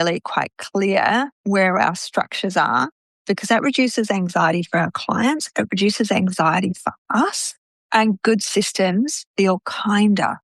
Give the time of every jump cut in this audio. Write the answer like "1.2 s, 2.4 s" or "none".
none